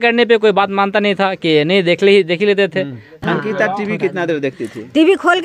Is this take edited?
yes; 1 cut; at 3.1 s

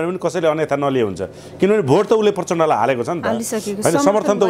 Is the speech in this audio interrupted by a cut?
no; 0 cuts

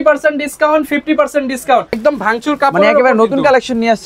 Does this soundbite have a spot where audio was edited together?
yes; 1 cut; at 1.9 s

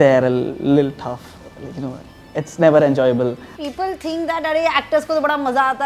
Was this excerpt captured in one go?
no; 1 cut; at 3.5 s

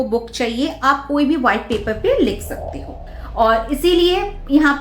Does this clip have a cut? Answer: yes; 1 cut; at 3.1 s

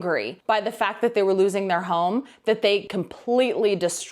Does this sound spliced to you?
yes; 1 cut; at 2.9 s

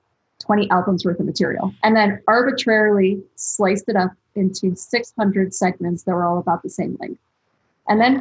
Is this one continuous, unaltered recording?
no; 1 cut; at 1.7 s

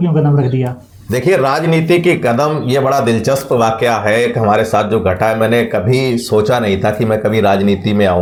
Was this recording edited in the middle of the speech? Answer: no; 0 cuts

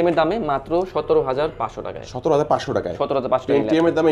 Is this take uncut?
yes; 0 cuts

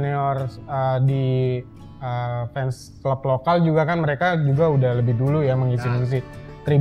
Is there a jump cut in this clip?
no; 0 cuts

